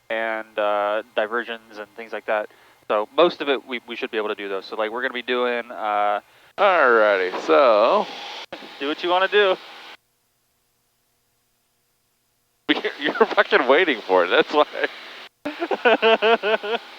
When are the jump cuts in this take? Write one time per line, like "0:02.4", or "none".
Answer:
0:06.4